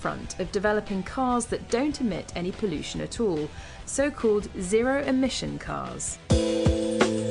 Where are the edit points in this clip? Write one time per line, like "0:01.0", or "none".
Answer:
0:01.1